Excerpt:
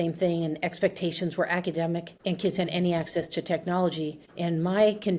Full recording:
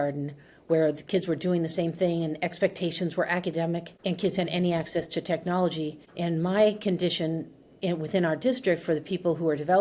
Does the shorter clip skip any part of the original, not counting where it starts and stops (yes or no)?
no